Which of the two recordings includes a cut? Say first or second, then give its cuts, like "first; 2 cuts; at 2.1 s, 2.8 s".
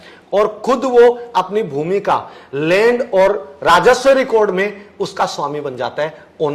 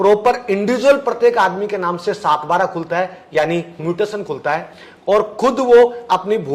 second; 1 cut; at 3.8 s